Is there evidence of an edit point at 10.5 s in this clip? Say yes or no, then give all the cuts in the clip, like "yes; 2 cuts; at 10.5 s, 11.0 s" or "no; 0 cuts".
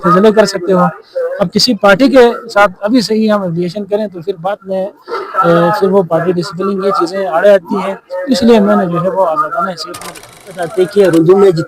yes; 1 cut; at 10.5 s